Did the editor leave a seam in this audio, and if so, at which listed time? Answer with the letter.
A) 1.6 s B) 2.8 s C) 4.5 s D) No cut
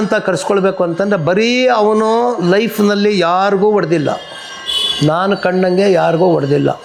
D